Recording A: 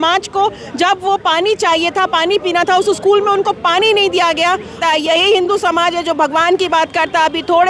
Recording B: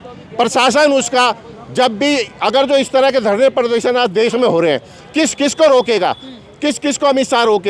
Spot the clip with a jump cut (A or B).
A